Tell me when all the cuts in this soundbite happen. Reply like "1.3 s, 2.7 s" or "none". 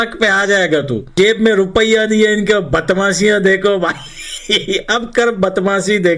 1.1 s